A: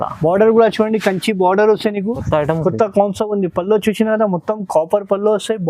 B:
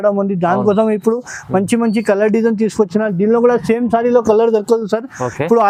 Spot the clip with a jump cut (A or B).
A